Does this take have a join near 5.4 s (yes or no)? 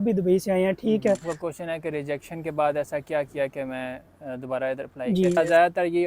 yes